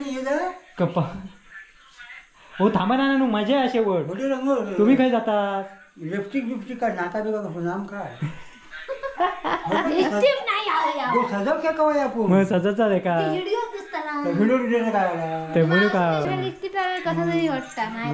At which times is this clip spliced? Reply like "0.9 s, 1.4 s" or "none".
16.2 s